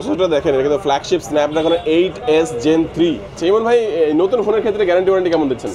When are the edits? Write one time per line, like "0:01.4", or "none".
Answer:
0:03.4